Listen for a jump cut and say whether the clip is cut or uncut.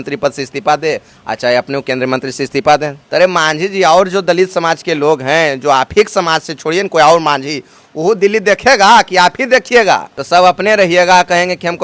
cut